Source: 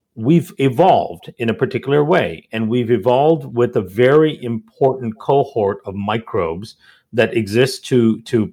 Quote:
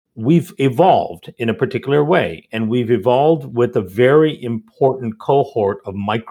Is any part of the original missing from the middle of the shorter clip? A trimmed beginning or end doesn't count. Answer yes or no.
no